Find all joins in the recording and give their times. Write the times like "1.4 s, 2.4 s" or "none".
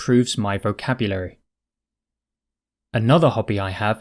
2.7 s